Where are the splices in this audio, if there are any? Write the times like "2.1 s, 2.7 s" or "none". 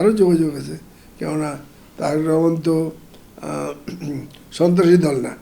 none